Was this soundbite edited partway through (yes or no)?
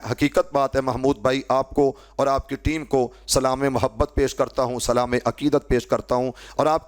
no